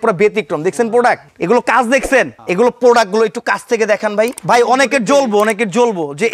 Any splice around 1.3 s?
yes; 3 cuts; at 1.3 s, 2.4 s, 4.4 s

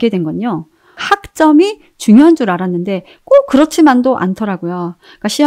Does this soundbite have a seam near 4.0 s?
no; 1 cut; at 1.0 s

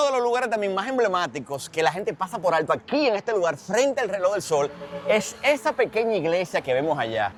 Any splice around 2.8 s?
no; 0 cuts

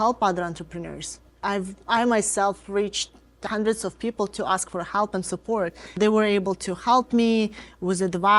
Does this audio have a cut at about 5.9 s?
yes; 3 cuts; at 1.4 s, 3.4 s, 5.9 s

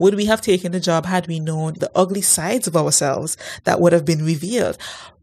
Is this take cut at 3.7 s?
no; 1 cut; at 1.8 s

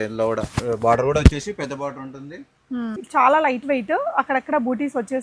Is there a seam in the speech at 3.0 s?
yes; 1 cut; at 3.0 s

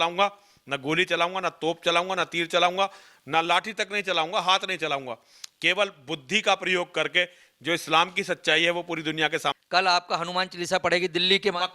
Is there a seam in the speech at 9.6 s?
yes; 1 cut; at 9.6 s

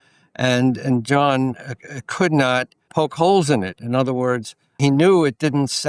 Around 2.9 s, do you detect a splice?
yes; 2 cuts; at 2.9 s, 4.7 s

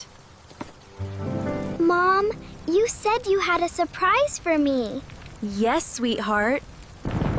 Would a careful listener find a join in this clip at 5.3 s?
no; 1 cut; at 1.7 s

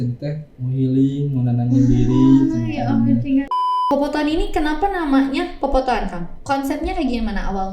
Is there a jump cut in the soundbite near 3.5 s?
yes; 1 cut; at 3.5 s

